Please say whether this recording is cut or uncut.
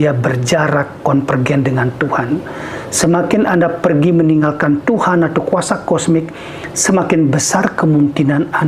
uncut